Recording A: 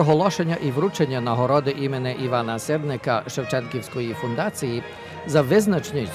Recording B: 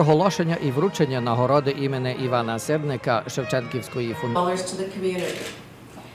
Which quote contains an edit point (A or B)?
A